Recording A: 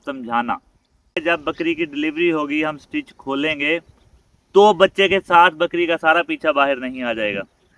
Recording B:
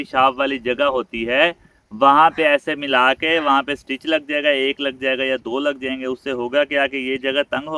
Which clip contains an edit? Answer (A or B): A